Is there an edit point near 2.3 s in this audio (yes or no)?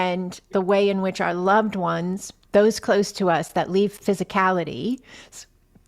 yes